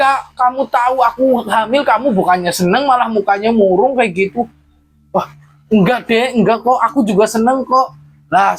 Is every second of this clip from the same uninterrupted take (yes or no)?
yes